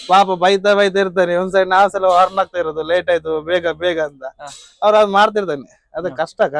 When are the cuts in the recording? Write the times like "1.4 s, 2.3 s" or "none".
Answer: none